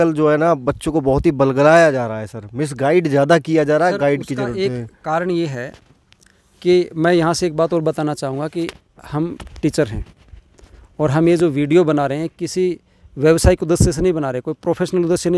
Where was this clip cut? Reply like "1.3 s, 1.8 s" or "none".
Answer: none